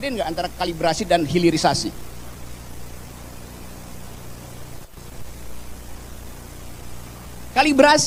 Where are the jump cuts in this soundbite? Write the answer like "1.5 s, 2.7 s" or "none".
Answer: none

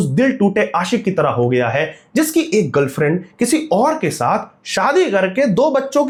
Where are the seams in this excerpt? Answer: none

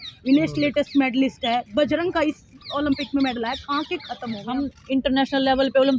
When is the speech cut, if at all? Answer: 4.5 s

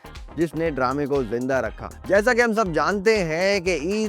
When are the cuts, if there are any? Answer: 1.9 s

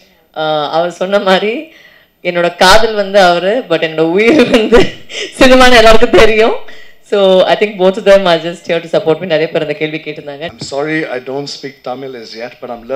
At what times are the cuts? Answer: 10.6 s

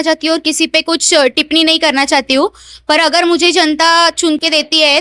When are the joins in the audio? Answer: none

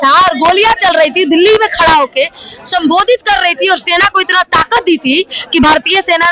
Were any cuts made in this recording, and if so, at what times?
none

